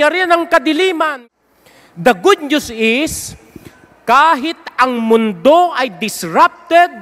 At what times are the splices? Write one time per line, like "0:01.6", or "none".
0:01.2